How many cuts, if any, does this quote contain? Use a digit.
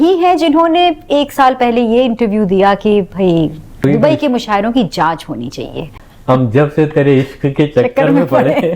2